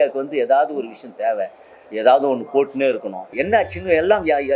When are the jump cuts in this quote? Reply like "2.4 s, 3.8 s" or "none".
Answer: 3.3 s